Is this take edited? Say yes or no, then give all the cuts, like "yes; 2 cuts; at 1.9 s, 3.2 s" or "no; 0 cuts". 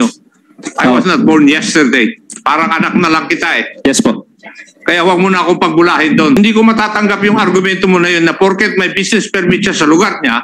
yes; 1 cut; at 6.4 s